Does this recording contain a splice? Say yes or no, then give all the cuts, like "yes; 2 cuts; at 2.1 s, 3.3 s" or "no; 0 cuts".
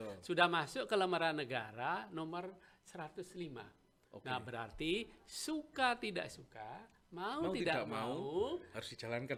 no; 0 cuts